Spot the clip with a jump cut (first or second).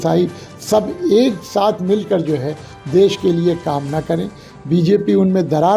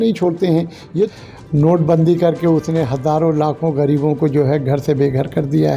second